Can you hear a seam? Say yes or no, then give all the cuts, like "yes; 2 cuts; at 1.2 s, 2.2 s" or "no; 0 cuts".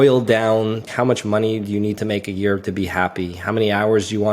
yes; 1 cut; at 0.9 s